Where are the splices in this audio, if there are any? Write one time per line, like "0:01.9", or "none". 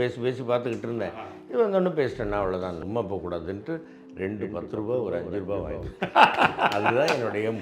0:02.7